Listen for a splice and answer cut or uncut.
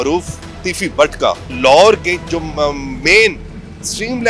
cut